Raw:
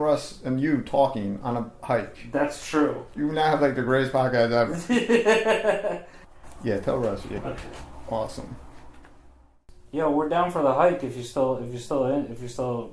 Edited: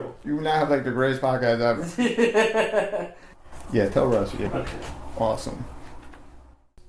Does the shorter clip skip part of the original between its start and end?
no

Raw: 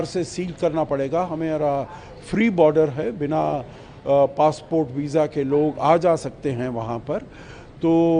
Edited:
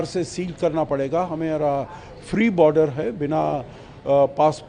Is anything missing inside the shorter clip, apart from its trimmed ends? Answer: no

